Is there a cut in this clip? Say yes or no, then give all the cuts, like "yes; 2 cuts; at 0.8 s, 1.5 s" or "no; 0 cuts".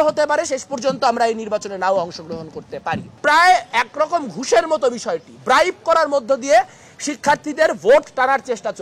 yes; 1 cut; at 3.2 s